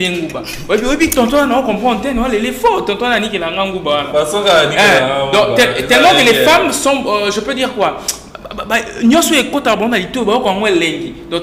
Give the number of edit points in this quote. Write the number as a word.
zero